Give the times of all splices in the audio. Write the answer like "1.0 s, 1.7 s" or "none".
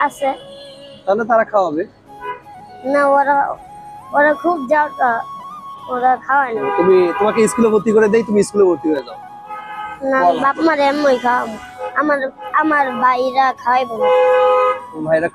6.5 s